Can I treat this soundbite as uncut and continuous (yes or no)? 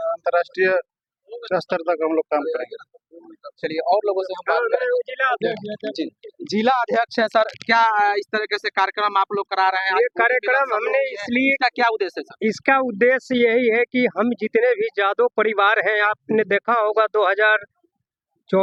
yes